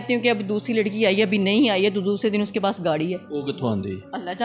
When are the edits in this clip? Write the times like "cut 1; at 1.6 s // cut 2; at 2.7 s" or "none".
cut 1; at 3.2 s